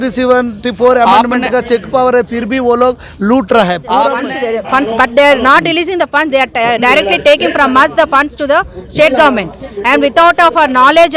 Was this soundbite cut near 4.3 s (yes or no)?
yes